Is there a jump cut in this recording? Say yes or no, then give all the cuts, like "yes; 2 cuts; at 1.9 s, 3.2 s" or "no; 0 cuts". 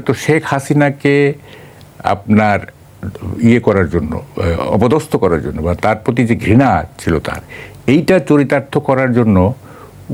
no; 0 cuts